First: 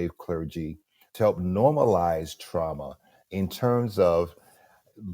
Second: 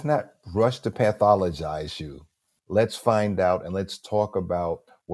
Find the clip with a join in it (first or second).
first